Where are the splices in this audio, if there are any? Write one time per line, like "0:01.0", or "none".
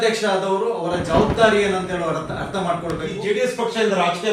0:03.1